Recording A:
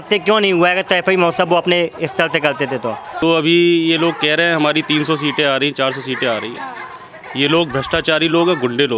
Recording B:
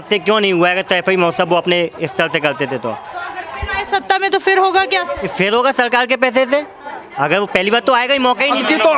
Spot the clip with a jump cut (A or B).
A